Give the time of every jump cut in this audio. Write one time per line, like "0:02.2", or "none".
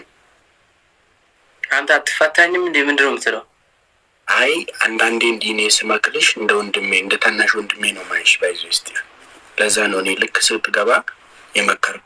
none